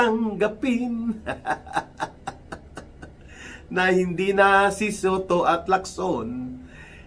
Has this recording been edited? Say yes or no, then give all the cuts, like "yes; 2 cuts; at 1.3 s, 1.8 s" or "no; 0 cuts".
no; 0 cuts